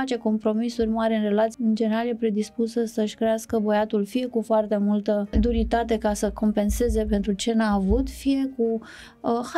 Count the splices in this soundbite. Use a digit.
2